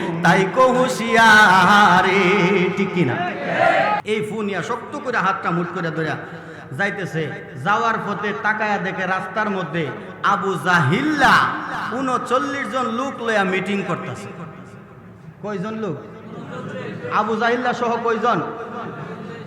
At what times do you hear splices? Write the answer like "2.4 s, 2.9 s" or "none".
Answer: 4.0 s